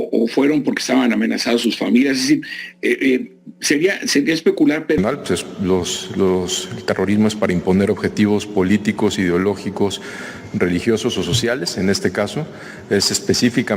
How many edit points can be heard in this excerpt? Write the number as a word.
one